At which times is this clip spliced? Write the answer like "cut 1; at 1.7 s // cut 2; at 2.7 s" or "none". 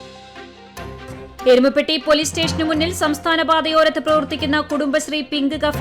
cut 1; at 1.4 s